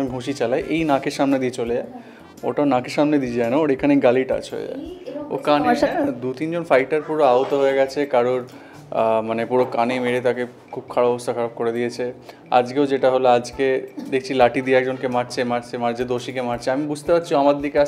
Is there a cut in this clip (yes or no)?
no